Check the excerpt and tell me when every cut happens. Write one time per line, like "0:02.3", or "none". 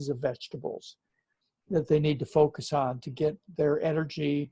none